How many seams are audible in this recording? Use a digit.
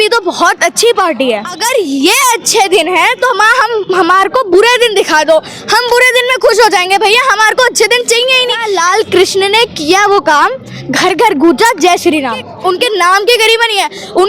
3